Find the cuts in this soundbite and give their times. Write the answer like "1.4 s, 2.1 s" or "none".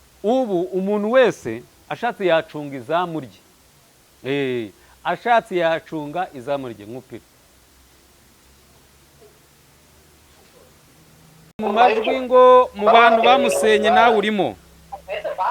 11.6 s